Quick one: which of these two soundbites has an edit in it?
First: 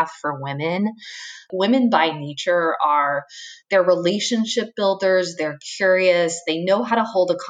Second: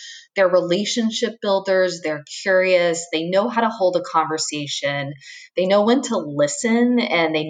first; 1 cut; at 1.5 s

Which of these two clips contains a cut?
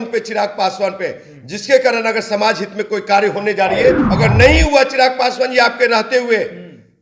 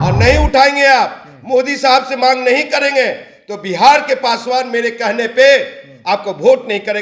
first; 1 cut; at 4.1 s

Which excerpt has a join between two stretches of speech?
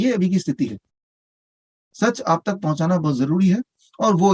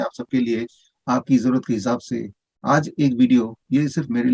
first; 1 cut; at 1.2 s

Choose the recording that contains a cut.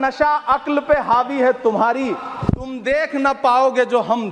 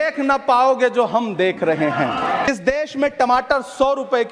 second; 1 cut; at 2.5 s

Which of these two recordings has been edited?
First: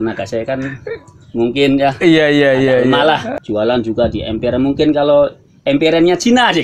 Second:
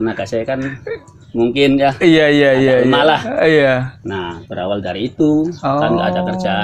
first; 1 cut; at 3.3 s

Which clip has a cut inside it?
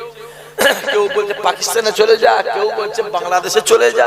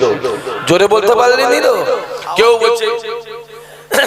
second; 1 cut; at 2.1 s

